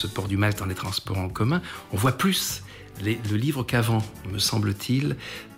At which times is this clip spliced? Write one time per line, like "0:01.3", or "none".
none